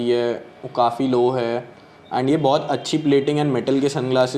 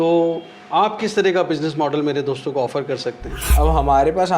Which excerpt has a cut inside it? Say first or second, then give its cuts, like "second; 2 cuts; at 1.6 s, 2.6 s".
second; 1 cut; at 3.5 s